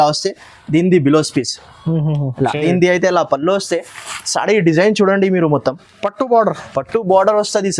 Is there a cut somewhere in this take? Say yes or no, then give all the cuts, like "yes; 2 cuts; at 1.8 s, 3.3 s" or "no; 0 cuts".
yes; 1 cut; at 2.4 s